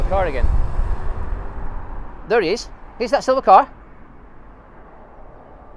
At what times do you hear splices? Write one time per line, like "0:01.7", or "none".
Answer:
0:01.9